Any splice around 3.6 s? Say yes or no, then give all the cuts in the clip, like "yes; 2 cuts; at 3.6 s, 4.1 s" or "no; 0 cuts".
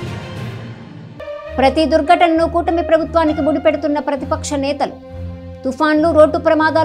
no; 1 cut; at 1.1 s